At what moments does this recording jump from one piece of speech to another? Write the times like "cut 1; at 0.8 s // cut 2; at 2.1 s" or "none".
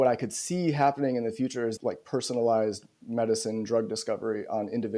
cut 1; at 1.7 s